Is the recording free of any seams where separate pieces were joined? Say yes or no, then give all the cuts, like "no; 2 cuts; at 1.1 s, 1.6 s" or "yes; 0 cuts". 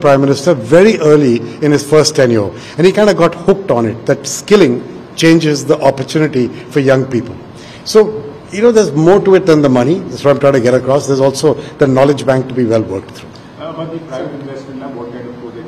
yes; 0 cuts